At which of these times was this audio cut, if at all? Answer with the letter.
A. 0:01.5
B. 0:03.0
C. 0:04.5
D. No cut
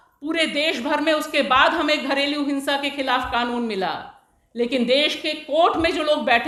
D